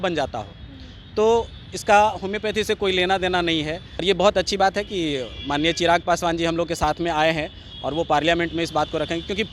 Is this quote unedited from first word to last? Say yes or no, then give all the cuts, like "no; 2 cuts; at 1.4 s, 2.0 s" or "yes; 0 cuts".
no; 1 cut; at 4.0 s